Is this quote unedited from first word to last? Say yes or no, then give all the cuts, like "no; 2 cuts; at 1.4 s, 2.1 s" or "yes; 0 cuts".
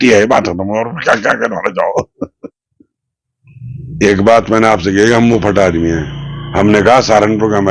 no; 1 cut; at 2.6 s